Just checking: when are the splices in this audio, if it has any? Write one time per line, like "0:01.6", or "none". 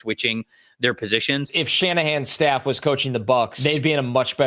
0:01.6
0:03.5